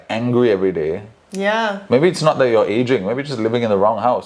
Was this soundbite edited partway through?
no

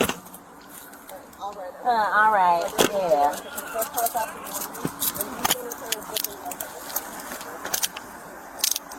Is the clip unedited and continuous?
yes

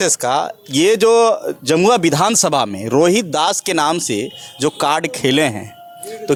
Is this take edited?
no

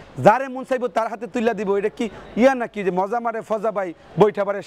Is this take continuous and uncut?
yes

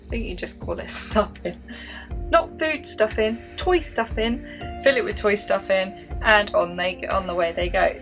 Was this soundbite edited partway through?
no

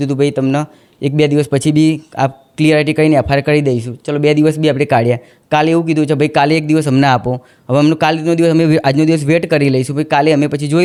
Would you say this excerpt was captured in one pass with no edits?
yes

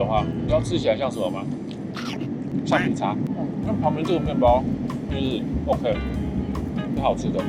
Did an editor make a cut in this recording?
no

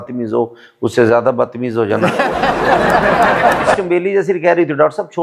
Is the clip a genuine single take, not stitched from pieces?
no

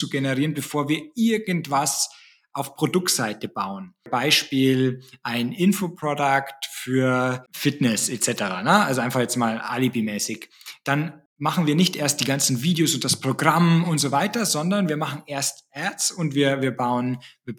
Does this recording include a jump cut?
no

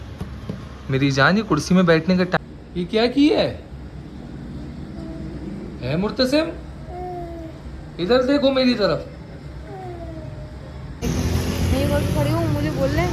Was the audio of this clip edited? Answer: yes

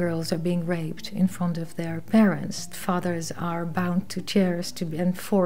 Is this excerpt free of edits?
no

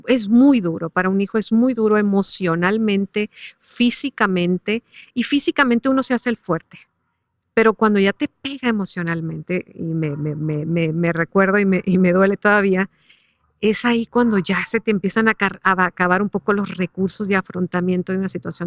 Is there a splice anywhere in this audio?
no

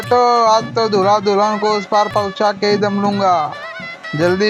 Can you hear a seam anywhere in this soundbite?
no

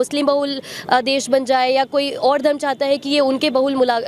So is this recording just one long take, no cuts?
yes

